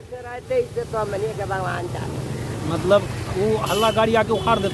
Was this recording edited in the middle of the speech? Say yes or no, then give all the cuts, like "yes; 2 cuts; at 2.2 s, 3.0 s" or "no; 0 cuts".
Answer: no; 0 cuts